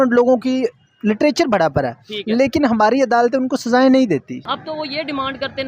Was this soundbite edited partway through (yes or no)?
yes